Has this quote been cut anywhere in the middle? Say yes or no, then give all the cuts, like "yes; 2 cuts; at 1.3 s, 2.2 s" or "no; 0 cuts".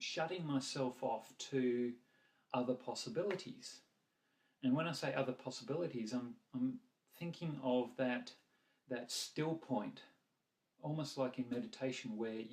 no; 0 cuts